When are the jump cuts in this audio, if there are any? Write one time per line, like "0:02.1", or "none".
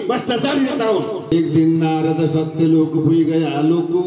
0:01.3

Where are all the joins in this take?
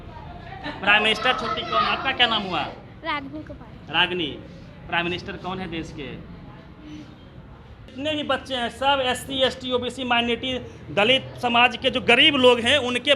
0:07.8

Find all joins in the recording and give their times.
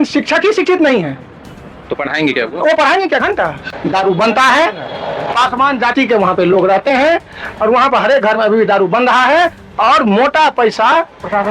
0:03.7

